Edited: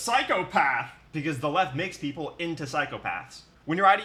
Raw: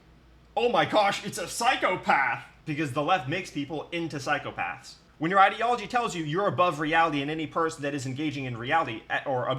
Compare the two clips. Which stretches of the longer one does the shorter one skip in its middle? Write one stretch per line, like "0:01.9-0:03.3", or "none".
none